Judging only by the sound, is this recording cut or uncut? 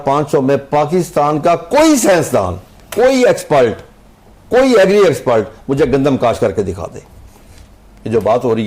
uncut